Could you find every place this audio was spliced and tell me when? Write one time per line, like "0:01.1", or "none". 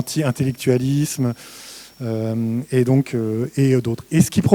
none